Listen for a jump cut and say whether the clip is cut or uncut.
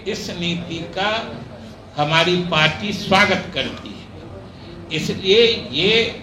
uncut